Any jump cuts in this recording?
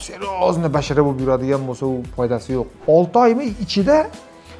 yes; 1 cut; at 2.7 s

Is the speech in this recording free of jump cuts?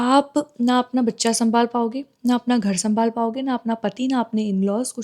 yes; 0 cuts

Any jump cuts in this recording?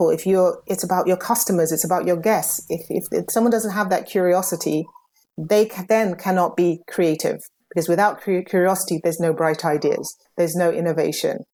no; 0 cuts

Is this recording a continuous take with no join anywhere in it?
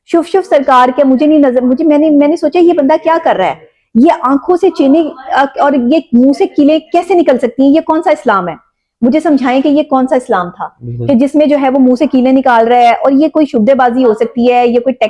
yes; 0 cuts

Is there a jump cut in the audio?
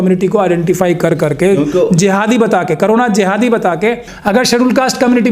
yes; 1 cut; at 4.1 s

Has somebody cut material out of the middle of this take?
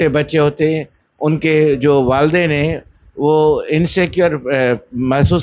no; 0 cuts

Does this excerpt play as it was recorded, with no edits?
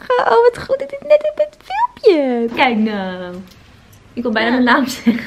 no; 1 cut; at 2.5 s

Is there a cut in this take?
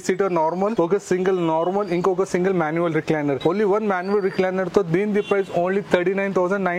yes; 2 cuts; at 0.7 s, 3.4 s

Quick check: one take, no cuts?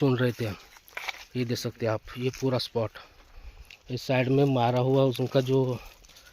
yes; 0 cuts

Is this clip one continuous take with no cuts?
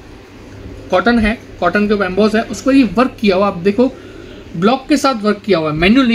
yes; 0 cuts

